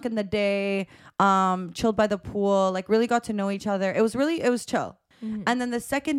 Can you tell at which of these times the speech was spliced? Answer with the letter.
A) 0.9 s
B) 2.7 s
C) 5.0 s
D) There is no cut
C